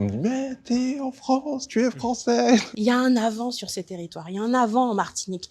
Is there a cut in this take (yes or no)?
yes